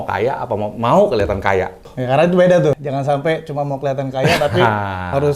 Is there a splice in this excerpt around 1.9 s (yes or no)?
yes